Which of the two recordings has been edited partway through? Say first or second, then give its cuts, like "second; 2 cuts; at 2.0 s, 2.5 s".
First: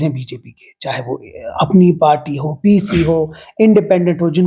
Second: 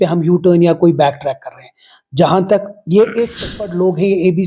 second; 1 cut; at 3.5 s